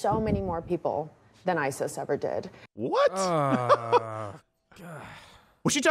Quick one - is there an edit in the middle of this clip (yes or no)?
no